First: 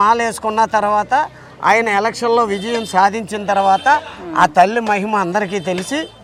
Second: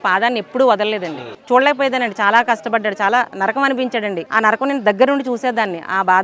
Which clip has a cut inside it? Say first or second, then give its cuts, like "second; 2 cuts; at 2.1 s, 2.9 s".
second; 2 cuts; at 1.3 s, 4.2 s